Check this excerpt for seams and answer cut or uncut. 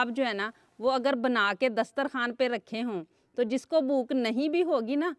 uncut